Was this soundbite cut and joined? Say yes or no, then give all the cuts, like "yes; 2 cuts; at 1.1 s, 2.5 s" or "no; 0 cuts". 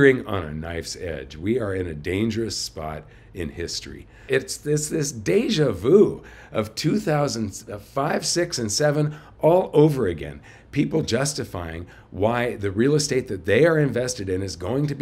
yes; 1 cut; at 4.2 s